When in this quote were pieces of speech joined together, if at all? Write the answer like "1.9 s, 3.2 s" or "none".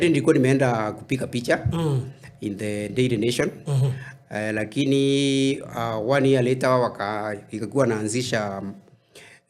none